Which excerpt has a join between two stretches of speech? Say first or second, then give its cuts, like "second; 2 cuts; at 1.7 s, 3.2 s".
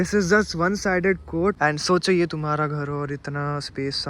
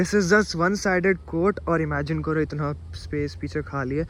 first; 1 cut; at 1.6 s